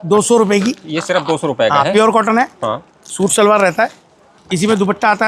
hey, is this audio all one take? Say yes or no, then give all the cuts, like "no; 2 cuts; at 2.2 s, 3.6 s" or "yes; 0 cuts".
yes; 0 cuts